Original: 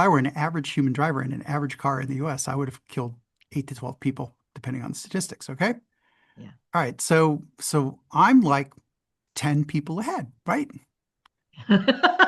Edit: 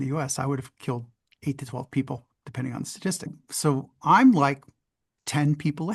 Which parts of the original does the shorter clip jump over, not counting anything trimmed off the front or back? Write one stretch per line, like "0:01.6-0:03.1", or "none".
0:05.5-0:07.5